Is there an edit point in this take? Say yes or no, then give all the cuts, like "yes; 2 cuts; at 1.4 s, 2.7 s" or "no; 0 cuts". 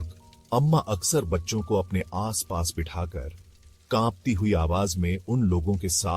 no; 0 cuts